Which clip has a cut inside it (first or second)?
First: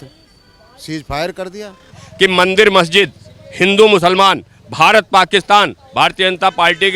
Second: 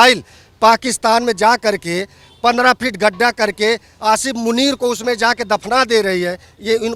first